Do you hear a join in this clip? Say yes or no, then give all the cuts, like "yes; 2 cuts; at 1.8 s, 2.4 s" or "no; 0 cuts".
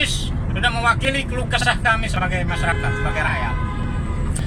no; 0 cuts